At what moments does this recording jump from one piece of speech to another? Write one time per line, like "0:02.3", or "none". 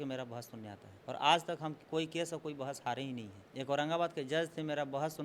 0:00.9
0:01.8
0:03.4